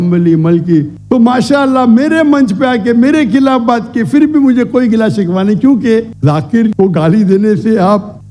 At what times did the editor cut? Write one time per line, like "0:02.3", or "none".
0:01.0
0:06.1